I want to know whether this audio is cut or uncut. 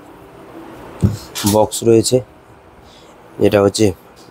uncut